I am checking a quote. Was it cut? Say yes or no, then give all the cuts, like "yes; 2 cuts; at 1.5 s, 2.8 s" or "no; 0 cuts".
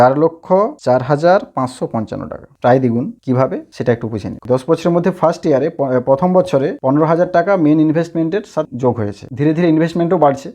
yes; 1 cut; at 4.4 s